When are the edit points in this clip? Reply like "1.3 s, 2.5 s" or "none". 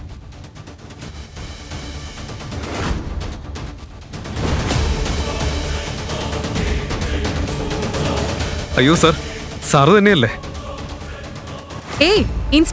8.6 s